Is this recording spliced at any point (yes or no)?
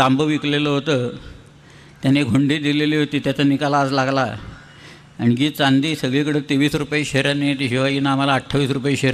no